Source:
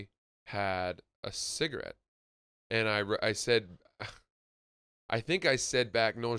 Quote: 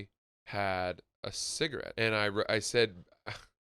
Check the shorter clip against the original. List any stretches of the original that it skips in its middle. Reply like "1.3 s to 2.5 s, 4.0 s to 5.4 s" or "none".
1.9 s to 2.6 s